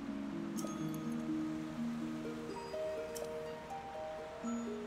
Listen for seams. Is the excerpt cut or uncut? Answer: uncut